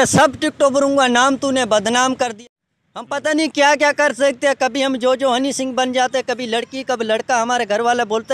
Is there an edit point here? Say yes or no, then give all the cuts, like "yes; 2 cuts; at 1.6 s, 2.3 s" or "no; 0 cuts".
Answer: yes; 1 cut; at 2.3 s